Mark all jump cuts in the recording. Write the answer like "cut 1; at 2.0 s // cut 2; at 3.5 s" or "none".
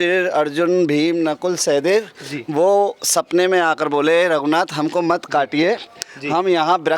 none